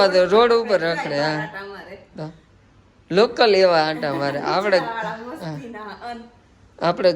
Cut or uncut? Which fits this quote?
uncut